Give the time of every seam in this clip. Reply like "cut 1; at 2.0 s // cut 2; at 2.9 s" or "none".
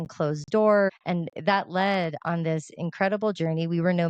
cut 1; at 0.9 s